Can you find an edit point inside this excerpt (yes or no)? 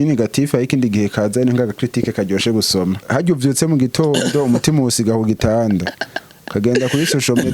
yes